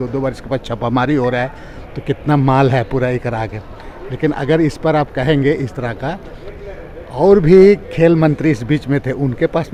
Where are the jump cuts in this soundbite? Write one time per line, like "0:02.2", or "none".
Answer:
none